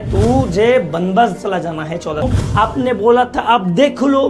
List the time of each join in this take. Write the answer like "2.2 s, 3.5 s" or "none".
2.3 s